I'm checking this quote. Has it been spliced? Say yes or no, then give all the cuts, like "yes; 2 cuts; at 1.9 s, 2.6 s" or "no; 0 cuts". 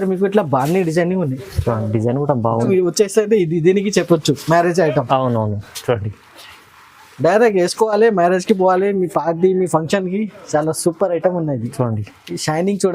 yes; 1 cut; at 2.7 s